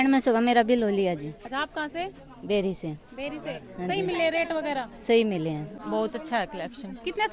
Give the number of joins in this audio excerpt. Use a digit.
1